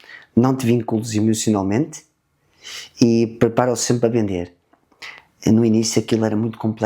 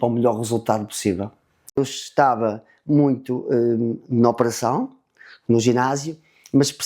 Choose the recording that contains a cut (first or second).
second